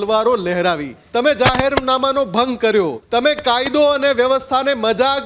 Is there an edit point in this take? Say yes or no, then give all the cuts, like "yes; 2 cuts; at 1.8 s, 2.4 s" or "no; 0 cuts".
yes; 2 cuts; at 0.9 s, 3.0 s